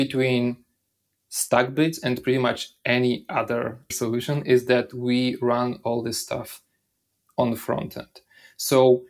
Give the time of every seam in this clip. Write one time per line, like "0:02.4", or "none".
0:03.9